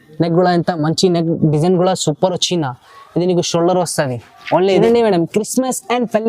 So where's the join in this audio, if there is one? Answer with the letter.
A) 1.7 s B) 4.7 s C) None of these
B